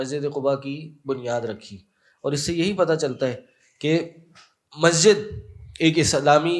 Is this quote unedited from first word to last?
yes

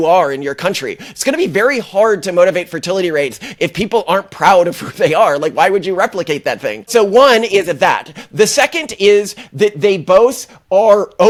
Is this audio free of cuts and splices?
yes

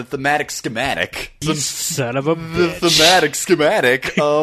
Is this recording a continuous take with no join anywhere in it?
no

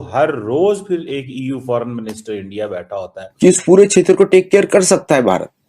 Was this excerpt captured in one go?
no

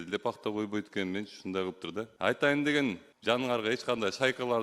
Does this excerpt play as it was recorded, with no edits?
no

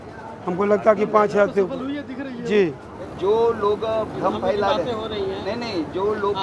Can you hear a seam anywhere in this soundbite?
yes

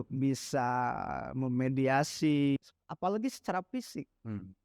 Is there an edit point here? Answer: yes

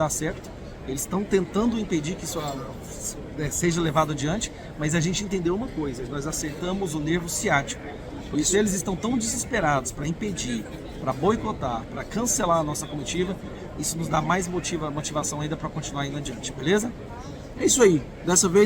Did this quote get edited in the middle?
no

